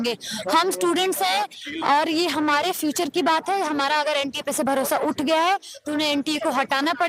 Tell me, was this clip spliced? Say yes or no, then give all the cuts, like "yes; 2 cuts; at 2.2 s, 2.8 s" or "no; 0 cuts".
no; 0 cuts